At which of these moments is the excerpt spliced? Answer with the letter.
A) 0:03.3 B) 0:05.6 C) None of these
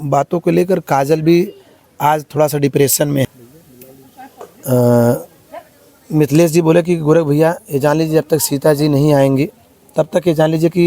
A